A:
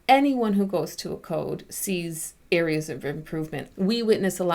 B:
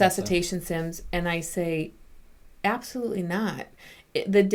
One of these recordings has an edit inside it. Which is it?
A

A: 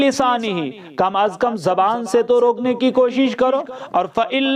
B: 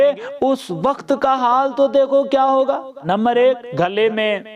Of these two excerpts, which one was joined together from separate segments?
B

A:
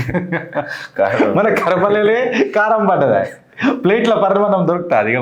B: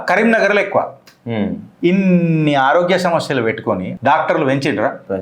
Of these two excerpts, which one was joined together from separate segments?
B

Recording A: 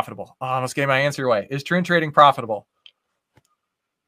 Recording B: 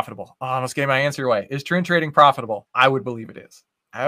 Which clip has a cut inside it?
B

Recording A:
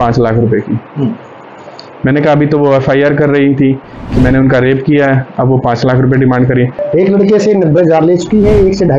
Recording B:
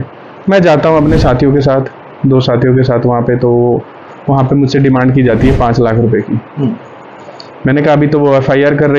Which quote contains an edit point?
A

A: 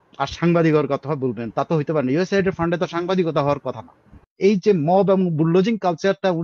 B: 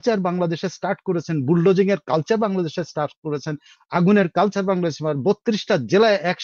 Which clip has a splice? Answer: A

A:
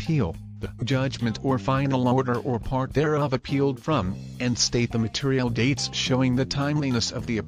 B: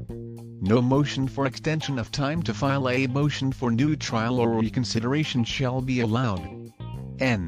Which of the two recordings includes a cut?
A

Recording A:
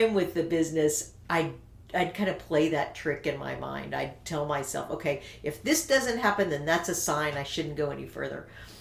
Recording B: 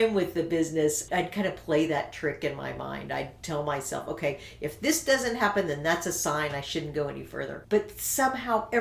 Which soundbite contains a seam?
B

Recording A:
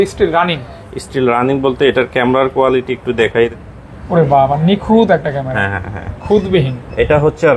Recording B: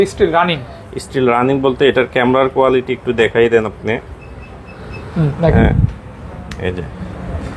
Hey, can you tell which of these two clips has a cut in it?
A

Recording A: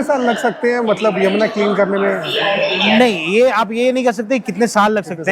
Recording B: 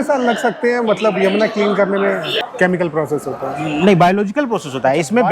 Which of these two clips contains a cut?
B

